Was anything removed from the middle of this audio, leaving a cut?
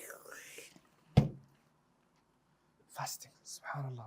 yes; 1 cut; at 2.8 s

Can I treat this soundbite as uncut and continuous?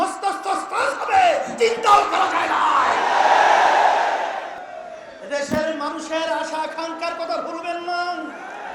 no; 1 cut; at 4.6 s

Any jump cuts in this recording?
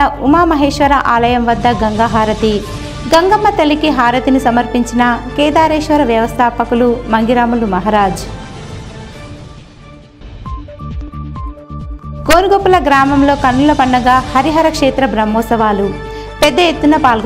no; 0 cuts

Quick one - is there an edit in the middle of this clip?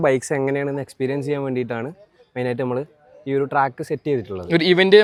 no; 0 cuts

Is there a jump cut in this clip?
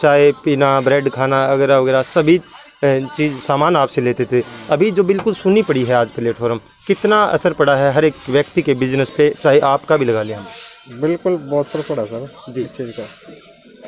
no; 0 cuts

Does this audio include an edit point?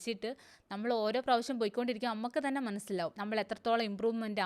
yes; 1 cut; at 3.2 s

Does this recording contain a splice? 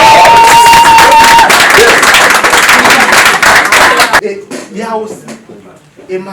yes; 1 cut; at 4.2 s

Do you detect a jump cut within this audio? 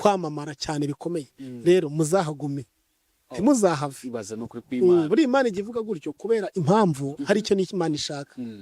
no; 0 cuts

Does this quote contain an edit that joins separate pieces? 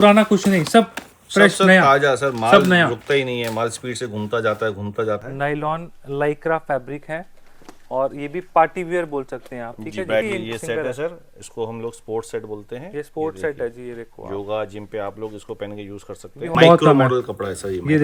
yes; 3 cuts; at 5.2 s, 10.2 s, 16.6 s

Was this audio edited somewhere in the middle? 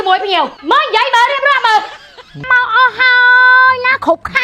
yes; 1 cut; at 2.4 s

